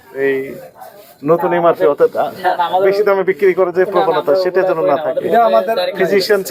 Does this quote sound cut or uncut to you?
uncut